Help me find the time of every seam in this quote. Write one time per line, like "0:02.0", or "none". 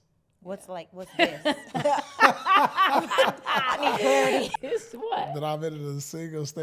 0:04.5